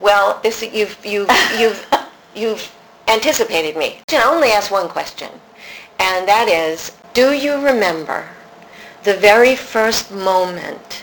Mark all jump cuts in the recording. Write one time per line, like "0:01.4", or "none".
0:04.1
0:06.9